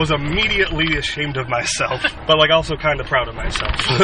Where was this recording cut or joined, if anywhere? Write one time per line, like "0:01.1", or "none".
0:02.1